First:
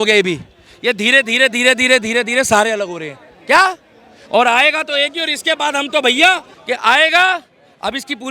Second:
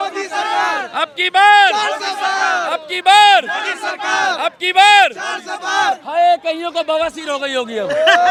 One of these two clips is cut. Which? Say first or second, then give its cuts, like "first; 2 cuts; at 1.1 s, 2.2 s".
first; 1 cut; at 6.5 s